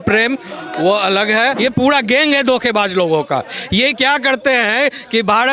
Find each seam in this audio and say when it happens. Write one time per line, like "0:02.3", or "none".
0:01.6